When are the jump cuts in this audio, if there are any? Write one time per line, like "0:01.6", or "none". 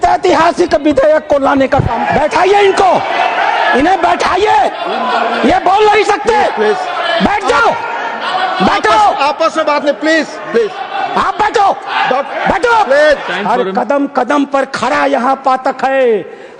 0:02.0
0:13.3